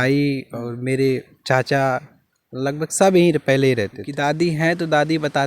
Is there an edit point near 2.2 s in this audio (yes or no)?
no